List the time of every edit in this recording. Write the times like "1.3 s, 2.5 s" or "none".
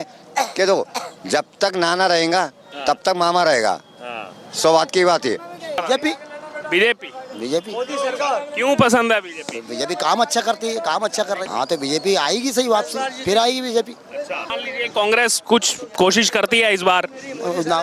5.8 s, 11.4 s, 14.5 s